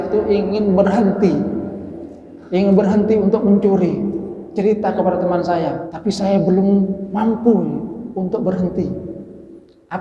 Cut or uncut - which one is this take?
cut